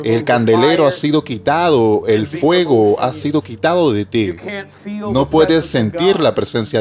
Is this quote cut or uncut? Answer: uncut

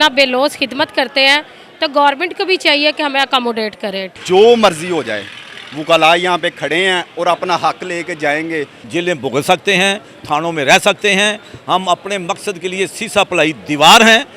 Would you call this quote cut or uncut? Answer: cut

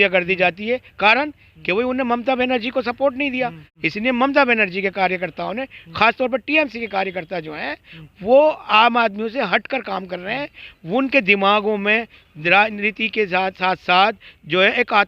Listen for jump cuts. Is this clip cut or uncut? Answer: cut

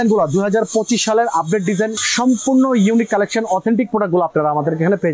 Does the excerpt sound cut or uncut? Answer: uncut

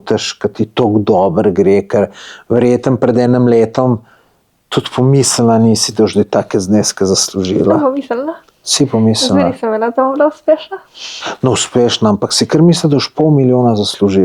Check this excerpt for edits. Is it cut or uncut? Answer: uncut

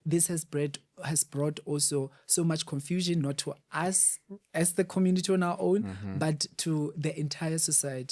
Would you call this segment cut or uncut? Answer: uncut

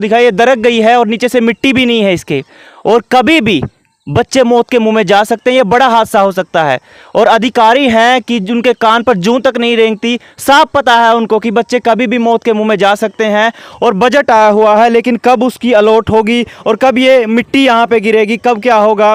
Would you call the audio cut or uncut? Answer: uncut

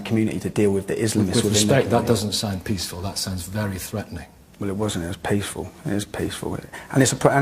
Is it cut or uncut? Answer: cut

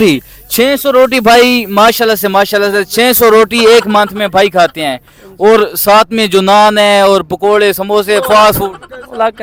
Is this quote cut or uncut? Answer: uncut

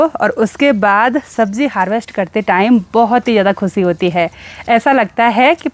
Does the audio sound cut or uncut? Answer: uncut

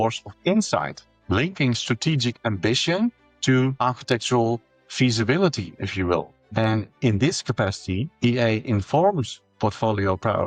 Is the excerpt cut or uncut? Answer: uncut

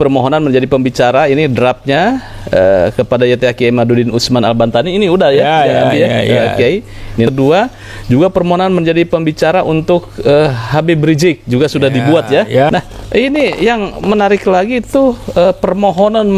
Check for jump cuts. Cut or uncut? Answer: cut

